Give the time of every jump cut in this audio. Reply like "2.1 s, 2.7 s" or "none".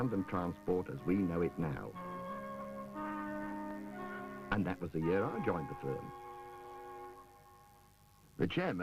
2.6 s